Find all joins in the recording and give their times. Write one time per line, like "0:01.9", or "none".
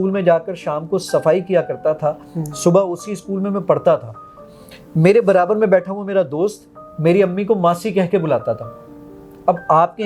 none